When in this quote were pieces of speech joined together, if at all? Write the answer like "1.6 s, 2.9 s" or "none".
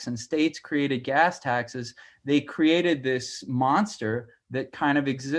none